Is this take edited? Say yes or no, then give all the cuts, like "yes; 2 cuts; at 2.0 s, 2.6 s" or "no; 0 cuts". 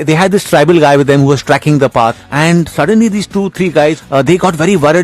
yes; 2 cuts; at 2.2 s, 4.0 s